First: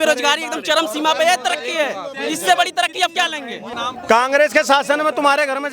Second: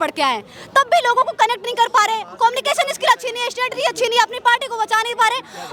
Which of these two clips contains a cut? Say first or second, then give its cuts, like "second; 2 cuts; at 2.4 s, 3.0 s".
first; 1 cut; at 3.6 s